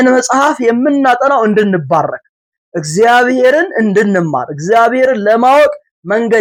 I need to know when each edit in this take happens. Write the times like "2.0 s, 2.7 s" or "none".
none